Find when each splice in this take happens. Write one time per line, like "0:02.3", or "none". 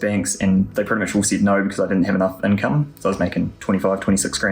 0:03.6

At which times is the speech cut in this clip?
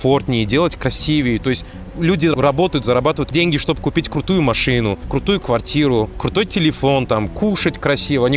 0:02.3
0:03.2
0:05.0
0:06.2

